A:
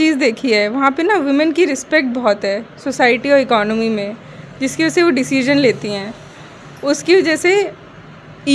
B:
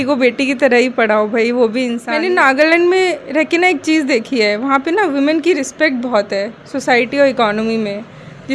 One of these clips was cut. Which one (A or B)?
B